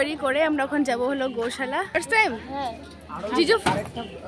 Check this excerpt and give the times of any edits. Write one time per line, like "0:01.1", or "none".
none